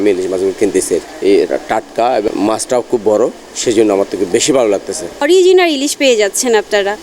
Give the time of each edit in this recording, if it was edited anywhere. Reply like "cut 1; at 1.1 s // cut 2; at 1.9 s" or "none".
cut 1; at 1.1 s // cut 2; at 2.3 s // cut 3; at 5.2 s